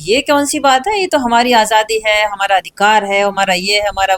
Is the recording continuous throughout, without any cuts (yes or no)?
yes